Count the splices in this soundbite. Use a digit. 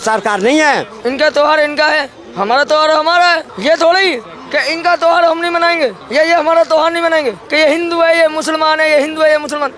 4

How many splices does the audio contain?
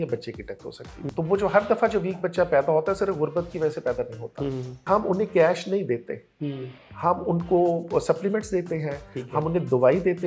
2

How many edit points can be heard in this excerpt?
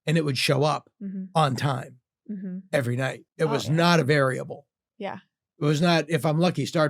1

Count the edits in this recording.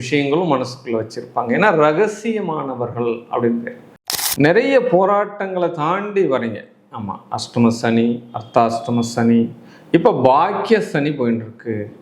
1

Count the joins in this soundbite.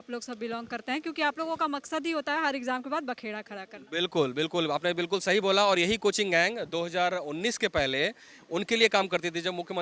0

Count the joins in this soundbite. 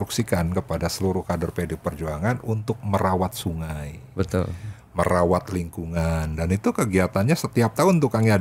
0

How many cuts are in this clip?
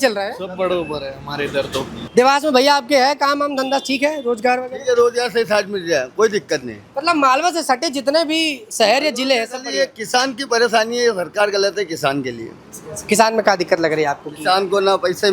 1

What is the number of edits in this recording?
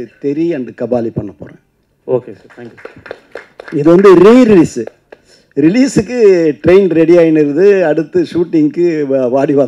0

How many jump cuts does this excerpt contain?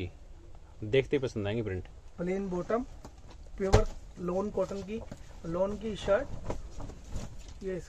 0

